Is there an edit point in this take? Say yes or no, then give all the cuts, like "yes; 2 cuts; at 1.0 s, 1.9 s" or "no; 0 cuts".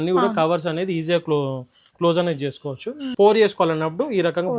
yes; 1 cut; at 3.0 s